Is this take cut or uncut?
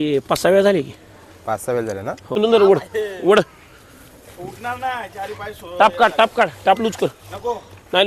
cut